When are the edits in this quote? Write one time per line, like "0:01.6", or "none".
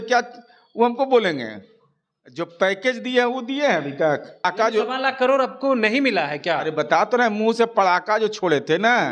0:04.4